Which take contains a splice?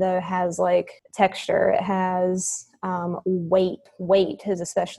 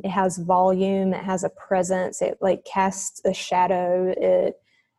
first; 2 cuts; at 1.0 s, 3.9 s

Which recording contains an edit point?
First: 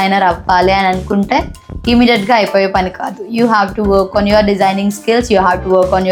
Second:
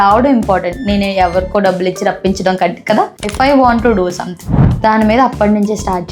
second; 1 cut; at 3.2 s

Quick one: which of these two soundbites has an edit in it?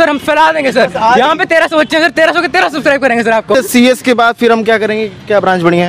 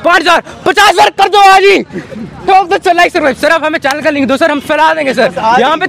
first; 1 cut; at 3.5 s

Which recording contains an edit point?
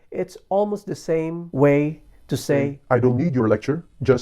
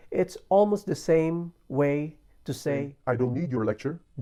first; 1 cut; at 1.4 s

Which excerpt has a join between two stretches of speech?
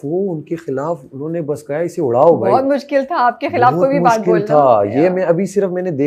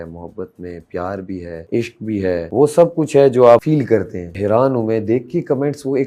second; 3 cuts; at 1.6 s, 2.5 s, 4.3 s

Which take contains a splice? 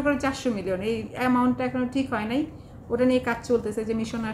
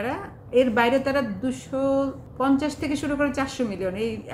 second; 1 cut; at 2.2 s

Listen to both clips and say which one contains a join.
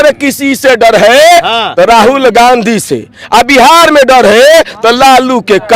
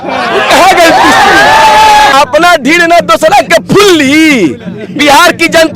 second; 1 cut; at 2.1 s

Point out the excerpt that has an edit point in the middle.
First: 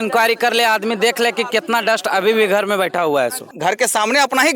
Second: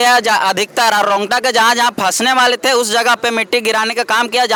first; 1 cut; at 3.5 s

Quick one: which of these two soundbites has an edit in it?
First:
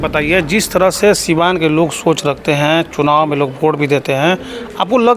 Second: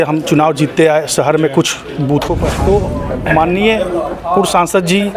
second; 1 cut; at 2.4 s

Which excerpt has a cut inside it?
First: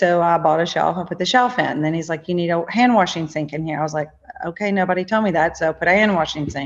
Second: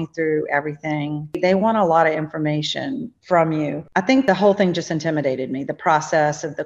second; 3 cuts; at 1.4 s, 3.1 s, 4.2 s

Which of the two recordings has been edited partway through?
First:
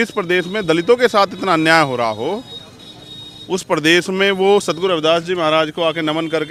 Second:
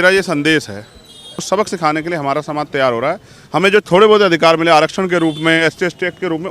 second; 1 cut; at 1.5 s

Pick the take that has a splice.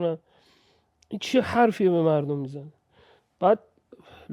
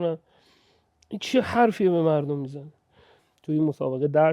second; 1 cut; at 3.2 s

